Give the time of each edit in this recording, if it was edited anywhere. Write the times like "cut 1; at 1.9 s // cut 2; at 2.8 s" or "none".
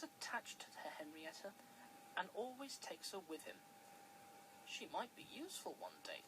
cut 1; at 3.7 s